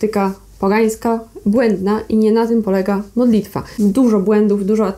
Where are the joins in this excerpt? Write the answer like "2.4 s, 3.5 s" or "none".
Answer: 3.7 s